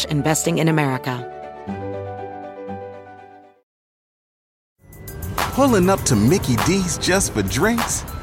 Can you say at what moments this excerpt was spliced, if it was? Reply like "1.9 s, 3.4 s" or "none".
1.2 s